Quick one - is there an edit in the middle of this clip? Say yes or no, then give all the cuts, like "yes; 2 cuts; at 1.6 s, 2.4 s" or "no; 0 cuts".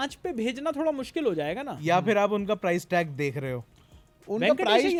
no; 0 cuts